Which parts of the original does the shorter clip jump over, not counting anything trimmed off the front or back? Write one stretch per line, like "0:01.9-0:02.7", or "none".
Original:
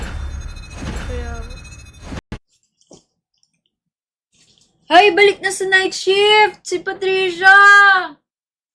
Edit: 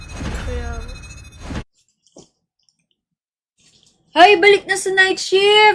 0:02.2-0:02.3